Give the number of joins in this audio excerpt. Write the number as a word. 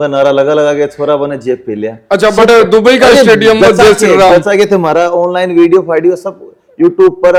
zero